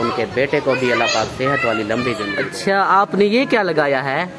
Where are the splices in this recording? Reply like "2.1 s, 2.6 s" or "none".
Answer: 2.4 s